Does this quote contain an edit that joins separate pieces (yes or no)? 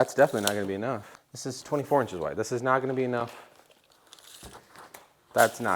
yes